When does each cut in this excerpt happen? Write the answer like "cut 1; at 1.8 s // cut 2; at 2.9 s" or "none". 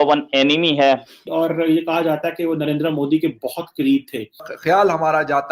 cut 1; at 1.2 s // cut 2; at 4.4 s